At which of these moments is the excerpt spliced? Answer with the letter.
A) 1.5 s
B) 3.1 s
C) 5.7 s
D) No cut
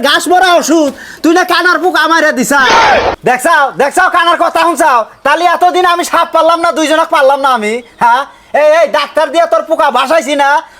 B